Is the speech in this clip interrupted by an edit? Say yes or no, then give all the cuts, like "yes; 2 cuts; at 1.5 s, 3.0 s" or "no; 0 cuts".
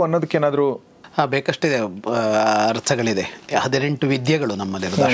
no; 0 cuts